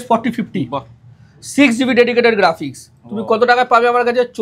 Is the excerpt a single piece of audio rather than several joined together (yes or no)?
yes